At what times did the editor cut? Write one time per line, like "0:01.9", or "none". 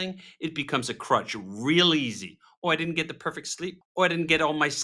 0:03.8